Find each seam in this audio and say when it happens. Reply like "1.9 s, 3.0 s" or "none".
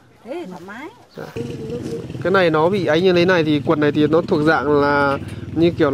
1.4 s